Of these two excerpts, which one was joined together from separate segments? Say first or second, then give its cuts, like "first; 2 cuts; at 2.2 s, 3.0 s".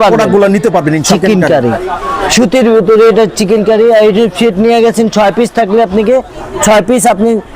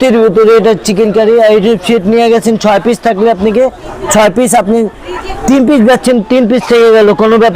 first; 1 cut; at 1.1 s